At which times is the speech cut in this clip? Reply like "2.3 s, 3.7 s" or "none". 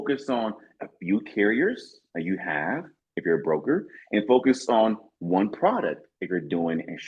none